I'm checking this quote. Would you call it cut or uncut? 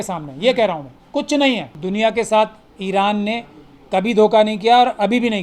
cut